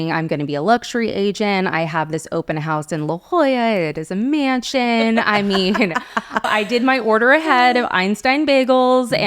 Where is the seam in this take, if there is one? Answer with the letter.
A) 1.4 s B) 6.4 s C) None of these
B